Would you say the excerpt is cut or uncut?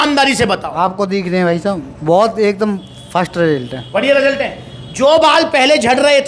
uncut